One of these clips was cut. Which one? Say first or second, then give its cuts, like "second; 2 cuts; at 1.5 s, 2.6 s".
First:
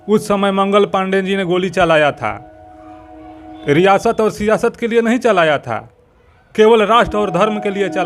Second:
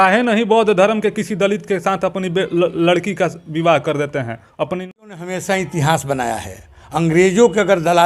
second; 1 cut; at 4.9 s